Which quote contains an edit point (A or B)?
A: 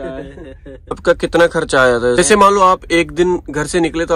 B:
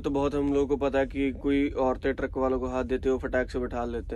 A